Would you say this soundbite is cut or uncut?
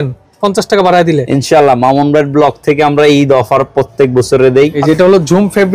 cut